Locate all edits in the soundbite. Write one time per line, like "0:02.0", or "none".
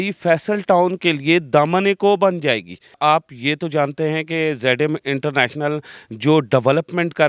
none